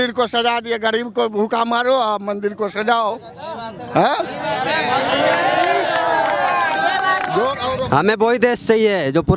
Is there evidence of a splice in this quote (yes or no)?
yes